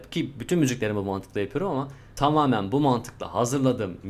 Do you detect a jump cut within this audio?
yes; 1 cut; at 2.0 s

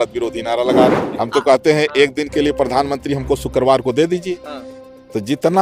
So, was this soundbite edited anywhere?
yes; 1 cut; at 1.1 s

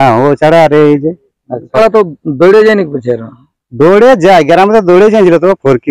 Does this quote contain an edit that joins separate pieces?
yes; 1 cut; at 1.8 s

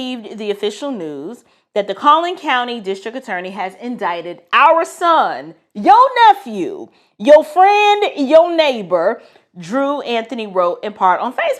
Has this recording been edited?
no; 0 cuts

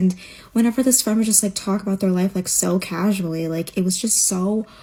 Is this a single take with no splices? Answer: yes; 0 cuts

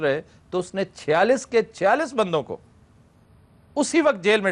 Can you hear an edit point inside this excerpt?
no; 0 cuts

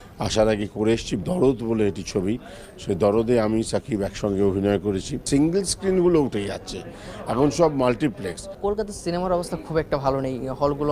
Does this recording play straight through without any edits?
no; 1 cut; at 0.9 s

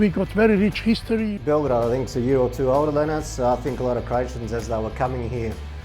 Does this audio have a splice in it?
yes; 1 cut; at 1.3 s

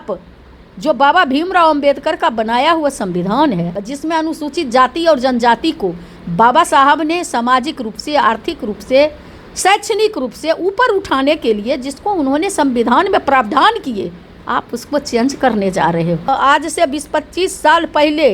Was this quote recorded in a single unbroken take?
no; 2 cuts; at 3.8 s, 16.3 s

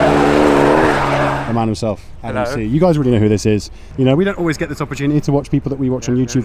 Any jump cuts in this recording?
yes; 2 cuts; at 1.4 s, 3.8 s

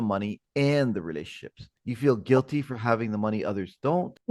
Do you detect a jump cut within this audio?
yes; 1 cut; at 1.6 s

